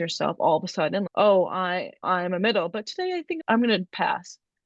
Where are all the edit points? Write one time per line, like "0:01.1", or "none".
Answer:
0:03.4